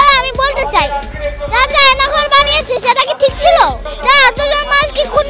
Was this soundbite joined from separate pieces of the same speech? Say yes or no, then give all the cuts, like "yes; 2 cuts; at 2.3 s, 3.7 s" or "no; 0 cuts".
yes; 1 cut; at 3.9 s